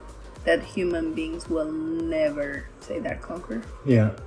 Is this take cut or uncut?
cut